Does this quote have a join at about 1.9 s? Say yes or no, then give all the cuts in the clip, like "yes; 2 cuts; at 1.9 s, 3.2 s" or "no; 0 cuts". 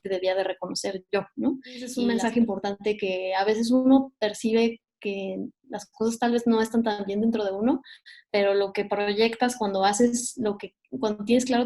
yes; 1 cut; at 1.9 s